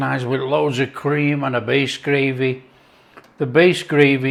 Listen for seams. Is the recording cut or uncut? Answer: uncut